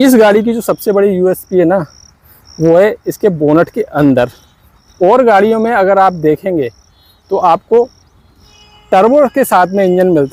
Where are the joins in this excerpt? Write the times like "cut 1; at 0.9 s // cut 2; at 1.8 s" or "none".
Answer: none